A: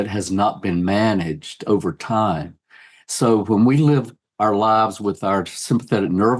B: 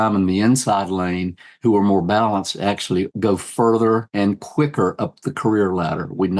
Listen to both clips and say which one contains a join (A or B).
B